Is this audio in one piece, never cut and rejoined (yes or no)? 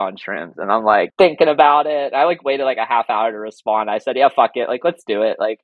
no